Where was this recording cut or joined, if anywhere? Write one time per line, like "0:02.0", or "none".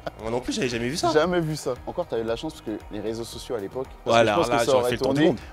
0:01.8
0:04.0